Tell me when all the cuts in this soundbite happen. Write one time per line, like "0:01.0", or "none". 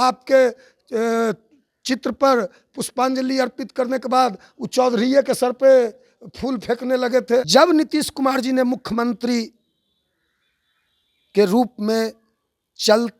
0:07.5